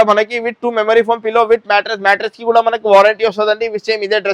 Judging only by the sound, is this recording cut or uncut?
uncut